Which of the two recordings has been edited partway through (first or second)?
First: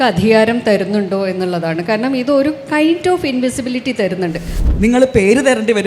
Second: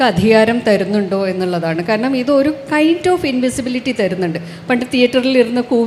first